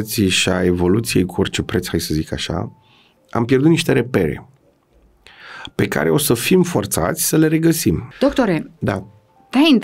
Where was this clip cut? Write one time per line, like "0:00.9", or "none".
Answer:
0:08.1